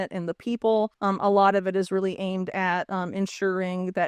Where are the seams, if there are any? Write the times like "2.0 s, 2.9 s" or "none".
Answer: 1.0 s